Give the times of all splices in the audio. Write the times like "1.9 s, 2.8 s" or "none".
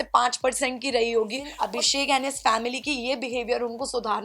1.5 s